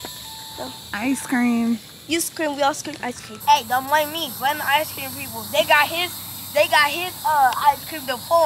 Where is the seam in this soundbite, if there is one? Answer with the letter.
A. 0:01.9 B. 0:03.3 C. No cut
B